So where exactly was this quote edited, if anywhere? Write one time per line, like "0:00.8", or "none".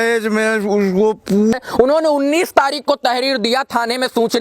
0:01.5